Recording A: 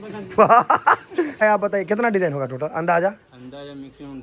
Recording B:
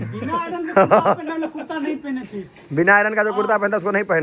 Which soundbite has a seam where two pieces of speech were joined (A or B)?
A